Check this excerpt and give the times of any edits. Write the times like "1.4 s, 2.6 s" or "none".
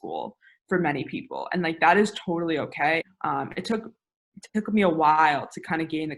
3.0 s

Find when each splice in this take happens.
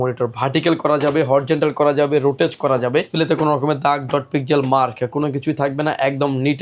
3.1 s

